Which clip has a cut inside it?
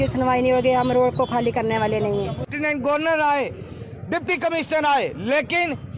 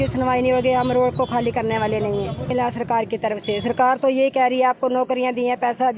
first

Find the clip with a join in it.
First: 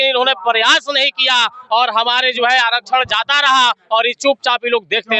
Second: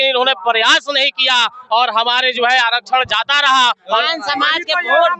second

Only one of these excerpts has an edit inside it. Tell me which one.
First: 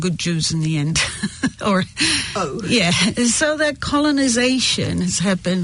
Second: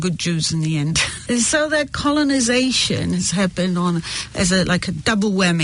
second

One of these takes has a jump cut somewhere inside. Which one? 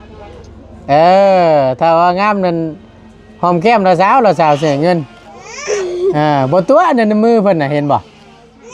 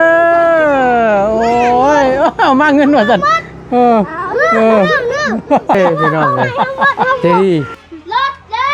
second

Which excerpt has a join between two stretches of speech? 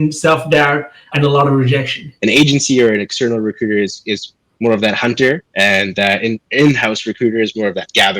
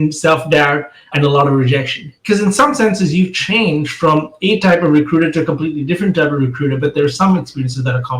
first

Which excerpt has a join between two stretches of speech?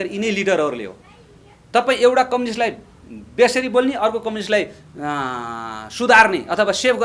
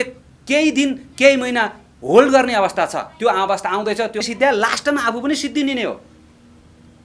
second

